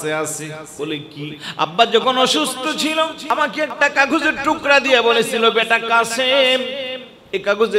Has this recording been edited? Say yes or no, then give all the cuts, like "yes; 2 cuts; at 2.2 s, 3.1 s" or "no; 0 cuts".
yes; 2 cuts; at 1.0 s, 3.2 s